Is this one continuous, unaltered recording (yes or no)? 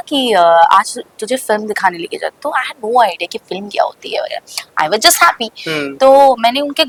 yes